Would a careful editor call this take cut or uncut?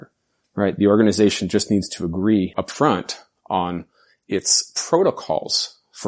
cut